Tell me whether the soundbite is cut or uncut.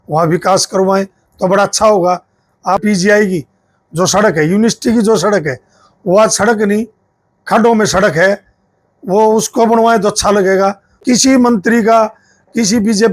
cut